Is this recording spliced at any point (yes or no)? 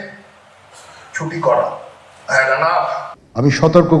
yes